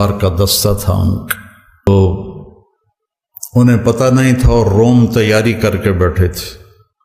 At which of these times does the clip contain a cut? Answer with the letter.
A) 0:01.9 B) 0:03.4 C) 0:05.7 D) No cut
A